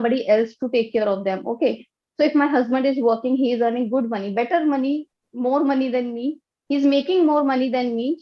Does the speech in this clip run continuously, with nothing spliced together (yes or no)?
yes